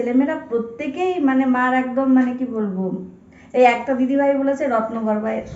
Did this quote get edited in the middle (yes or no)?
no